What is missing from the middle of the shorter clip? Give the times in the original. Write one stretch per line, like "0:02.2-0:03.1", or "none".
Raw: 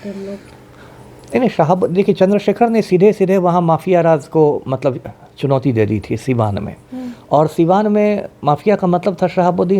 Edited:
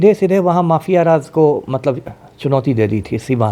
none